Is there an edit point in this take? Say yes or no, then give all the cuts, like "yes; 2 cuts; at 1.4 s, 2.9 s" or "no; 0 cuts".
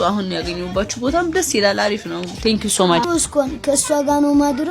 yes; 1 cut; at 3.0 s